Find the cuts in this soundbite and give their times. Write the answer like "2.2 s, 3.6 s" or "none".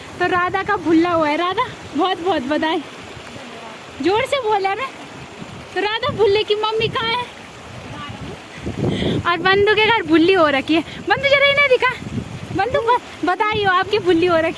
none